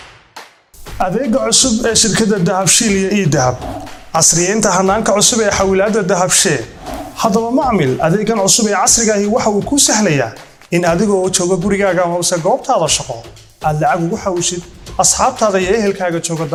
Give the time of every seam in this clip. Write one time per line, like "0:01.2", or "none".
none